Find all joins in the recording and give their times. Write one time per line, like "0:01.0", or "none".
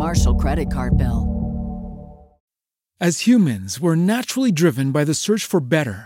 0:02.3